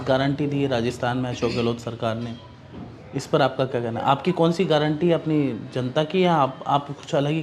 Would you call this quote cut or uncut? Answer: uncut